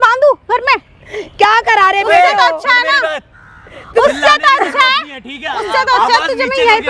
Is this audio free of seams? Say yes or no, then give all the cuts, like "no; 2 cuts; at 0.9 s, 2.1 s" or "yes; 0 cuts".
yes; 0 cuts